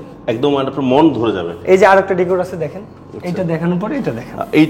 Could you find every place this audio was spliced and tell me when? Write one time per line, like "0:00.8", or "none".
none